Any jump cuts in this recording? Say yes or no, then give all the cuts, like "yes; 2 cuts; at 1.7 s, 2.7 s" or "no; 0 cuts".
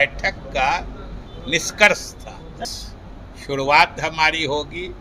yes; 1 cut; at 2.7 s